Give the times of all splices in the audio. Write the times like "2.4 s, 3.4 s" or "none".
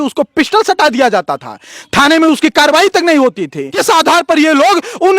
3.7 s